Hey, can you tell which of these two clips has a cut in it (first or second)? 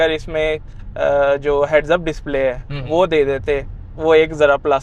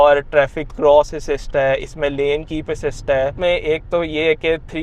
second